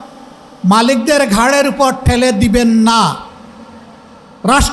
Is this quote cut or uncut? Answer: uncut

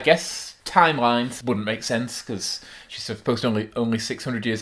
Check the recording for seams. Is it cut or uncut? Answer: cut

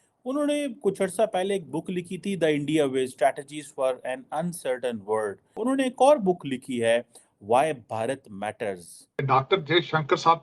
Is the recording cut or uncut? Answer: cut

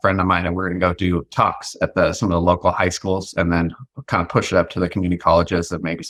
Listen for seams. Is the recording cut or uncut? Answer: uncut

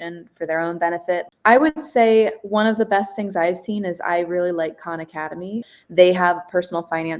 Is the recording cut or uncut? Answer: cut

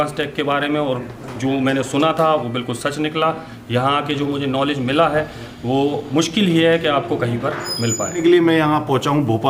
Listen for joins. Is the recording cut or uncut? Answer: cut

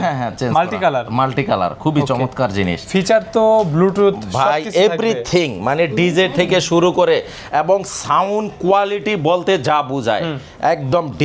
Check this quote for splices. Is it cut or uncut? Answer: uncut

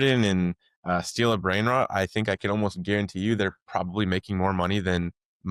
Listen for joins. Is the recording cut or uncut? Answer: uncut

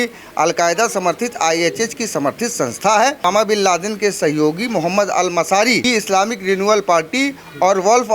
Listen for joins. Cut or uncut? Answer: cut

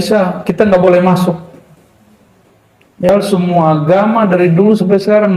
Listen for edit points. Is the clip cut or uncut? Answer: cut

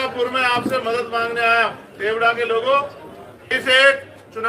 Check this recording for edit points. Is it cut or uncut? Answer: cut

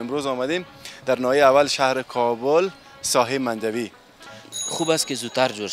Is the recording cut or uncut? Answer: cut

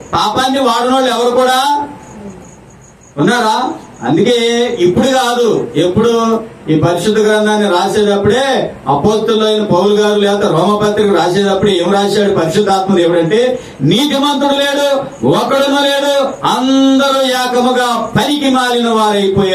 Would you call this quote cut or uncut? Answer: uncut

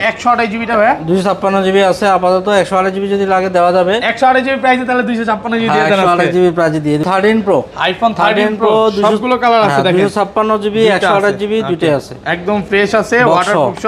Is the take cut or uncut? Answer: cut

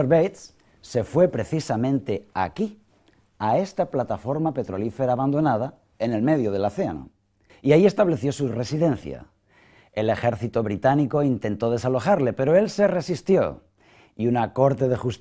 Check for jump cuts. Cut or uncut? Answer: uncut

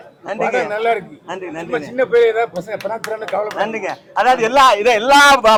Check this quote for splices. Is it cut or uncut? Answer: uncut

